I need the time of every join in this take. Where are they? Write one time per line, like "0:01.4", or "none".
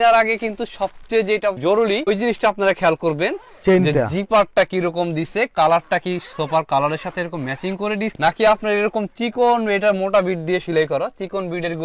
none